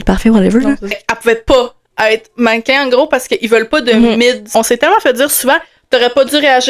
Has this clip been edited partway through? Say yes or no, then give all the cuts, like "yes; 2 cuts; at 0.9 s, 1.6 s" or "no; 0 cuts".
yes; 2 cuts; at 1.0 s, 4.5 s